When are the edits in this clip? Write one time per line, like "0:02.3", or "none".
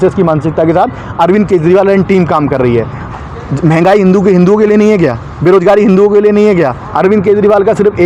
0:03.0
0:06.8